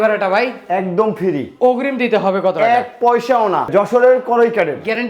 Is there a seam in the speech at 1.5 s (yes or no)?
no